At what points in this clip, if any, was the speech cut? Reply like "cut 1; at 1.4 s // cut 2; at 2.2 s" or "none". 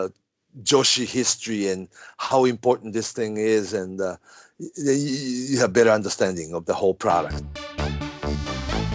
cut 1; at 7.4 s